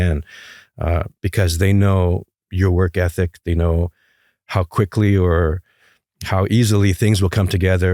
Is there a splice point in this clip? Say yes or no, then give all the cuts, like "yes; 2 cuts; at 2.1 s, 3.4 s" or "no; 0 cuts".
no; 0 cuts